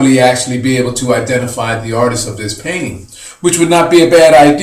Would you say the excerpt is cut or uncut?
cut